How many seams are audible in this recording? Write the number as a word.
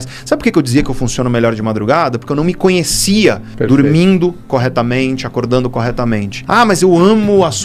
one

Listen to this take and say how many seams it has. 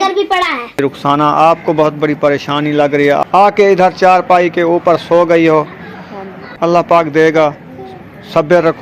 three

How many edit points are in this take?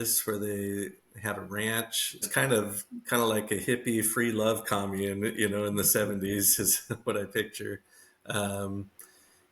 one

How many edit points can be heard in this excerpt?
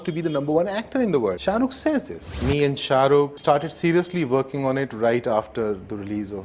two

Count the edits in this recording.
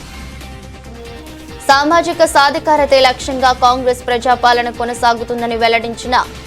one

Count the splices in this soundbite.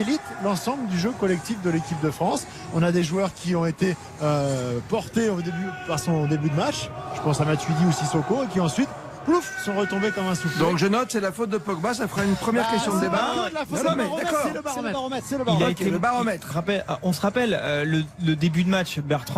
one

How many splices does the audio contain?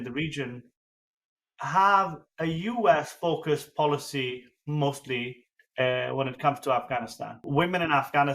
one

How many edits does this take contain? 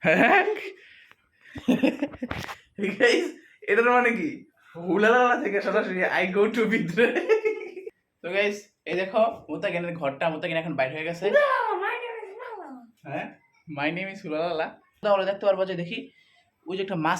two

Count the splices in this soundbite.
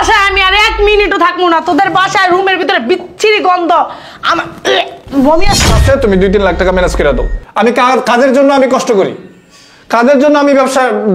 one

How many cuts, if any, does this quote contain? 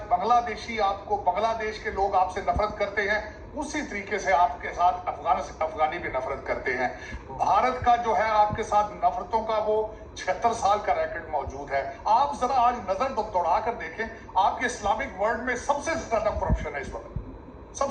one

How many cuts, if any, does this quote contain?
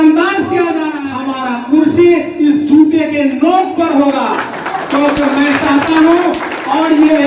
one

